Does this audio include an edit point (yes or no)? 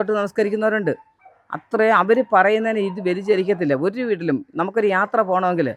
no